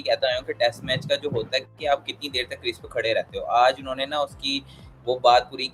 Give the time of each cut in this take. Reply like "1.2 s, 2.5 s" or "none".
none